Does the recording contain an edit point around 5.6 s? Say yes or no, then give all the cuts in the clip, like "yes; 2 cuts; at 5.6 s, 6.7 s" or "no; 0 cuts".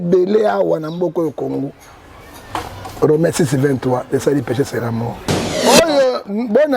yes; 1 cut; at 5.6 s